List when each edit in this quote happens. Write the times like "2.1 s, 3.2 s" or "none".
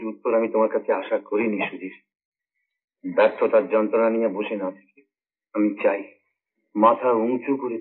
none

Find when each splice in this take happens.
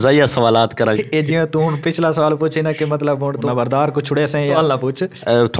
1.0 s, 3.4 s, 4.6 s

